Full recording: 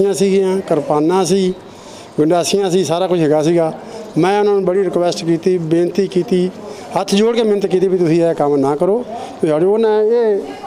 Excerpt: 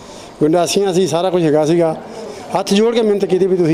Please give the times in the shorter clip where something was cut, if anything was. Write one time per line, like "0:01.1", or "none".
0:02.2